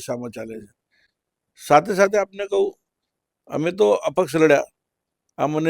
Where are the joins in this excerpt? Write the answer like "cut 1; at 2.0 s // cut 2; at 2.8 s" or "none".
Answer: none